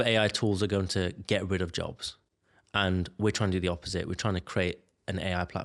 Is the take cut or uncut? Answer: uncut